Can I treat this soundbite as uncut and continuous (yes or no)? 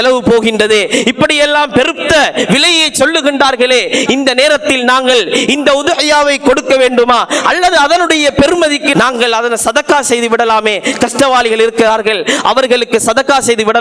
no